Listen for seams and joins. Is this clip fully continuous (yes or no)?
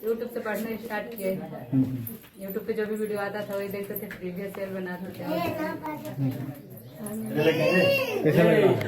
yes